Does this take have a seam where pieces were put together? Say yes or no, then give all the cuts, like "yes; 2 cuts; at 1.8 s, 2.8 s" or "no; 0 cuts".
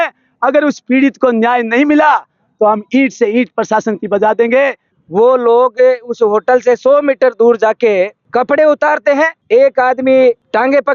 yes; 2 cuts; at 4.8 s, 8.2 s